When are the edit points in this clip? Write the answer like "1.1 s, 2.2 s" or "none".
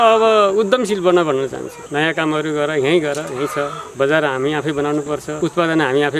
1.7 s, 3.8 s, 5.3 s